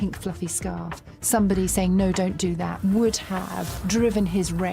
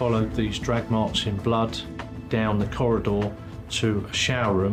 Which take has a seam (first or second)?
first